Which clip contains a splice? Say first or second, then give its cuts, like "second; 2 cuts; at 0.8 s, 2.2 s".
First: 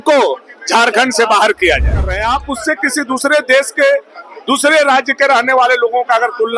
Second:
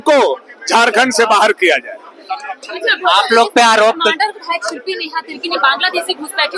first; 1 cut; at 2.2 s